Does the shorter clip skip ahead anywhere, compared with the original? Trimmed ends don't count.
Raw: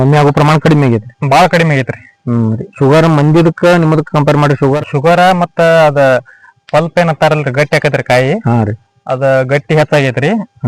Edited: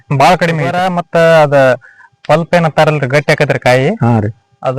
yes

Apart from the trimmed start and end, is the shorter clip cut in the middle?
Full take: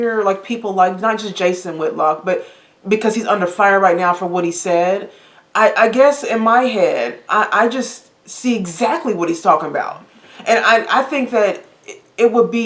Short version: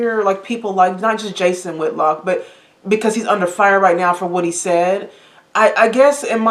no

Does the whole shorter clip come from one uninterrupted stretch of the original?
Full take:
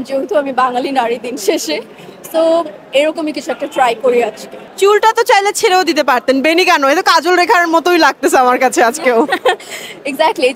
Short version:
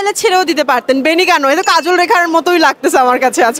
yes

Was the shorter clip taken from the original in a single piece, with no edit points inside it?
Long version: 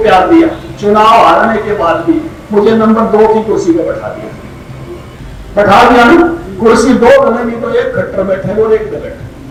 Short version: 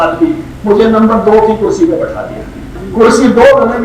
no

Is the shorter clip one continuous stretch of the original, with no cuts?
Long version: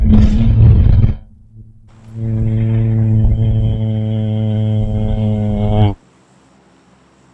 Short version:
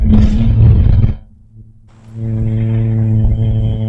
yes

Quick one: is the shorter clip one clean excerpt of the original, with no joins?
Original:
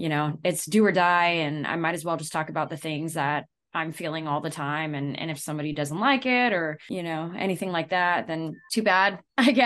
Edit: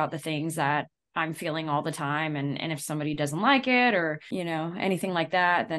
yes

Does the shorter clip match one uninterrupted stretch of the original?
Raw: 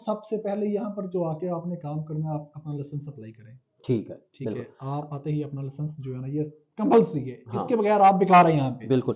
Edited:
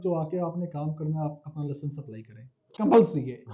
no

